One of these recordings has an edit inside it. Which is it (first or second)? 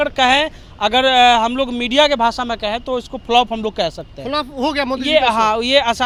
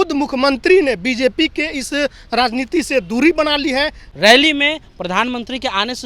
second